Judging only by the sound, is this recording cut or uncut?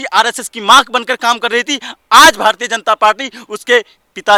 uncut